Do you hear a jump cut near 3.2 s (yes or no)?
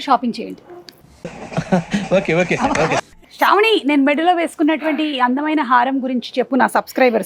no